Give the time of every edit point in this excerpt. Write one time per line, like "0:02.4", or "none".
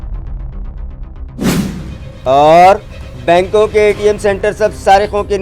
0:01.9